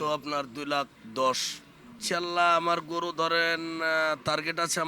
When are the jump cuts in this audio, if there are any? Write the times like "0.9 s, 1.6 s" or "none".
1.0 s, 1.9 s